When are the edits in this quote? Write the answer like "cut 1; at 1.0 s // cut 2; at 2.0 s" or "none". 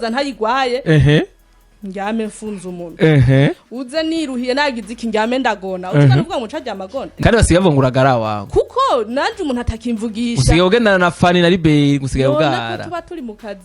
cut 1; at 7.1 s